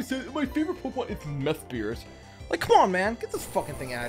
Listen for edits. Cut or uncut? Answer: uncut